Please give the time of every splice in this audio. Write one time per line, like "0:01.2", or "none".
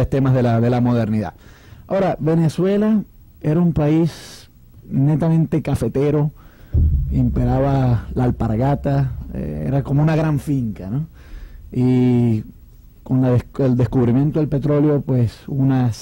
0:01.3